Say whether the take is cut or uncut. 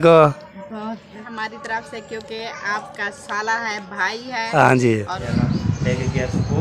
cut